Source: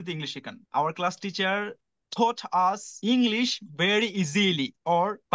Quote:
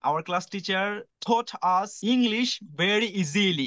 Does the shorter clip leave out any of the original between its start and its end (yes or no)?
yes